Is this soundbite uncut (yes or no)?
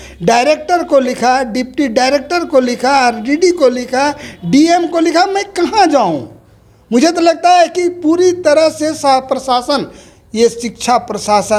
yes